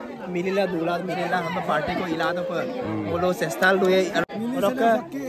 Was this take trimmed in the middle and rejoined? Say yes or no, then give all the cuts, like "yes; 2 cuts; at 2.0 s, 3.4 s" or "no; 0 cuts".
yes; 1 cut; at 4.2 s